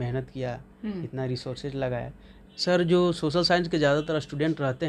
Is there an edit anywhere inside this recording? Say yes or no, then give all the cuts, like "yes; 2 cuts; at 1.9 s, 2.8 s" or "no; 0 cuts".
yes; 1 cut; at 2.3 s